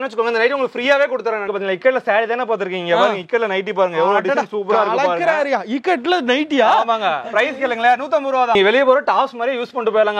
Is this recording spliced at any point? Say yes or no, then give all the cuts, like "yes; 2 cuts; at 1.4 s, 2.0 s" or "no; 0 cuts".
yes; 2 cuts; at 1.5 s, 8.6 s